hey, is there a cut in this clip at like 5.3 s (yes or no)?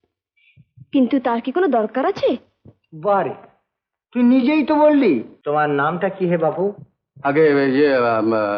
yes